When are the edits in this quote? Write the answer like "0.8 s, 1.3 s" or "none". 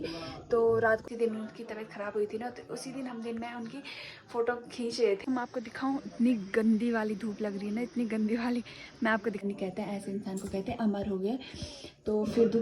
1.0 s, 5.2 s, 9.4 s